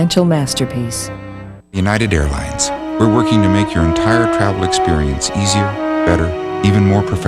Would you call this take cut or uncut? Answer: cut